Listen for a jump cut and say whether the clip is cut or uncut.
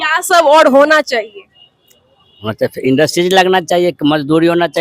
uncut